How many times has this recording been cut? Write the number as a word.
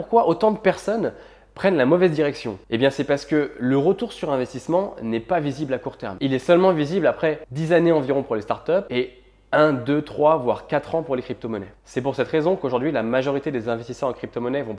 three